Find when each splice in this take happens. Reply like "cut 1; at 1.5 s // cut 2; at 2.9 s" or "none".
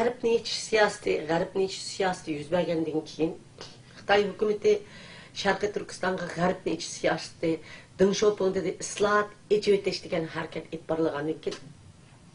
none